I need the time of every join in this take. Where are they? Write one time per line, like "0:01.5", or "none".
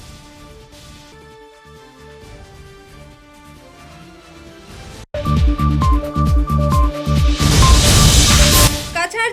none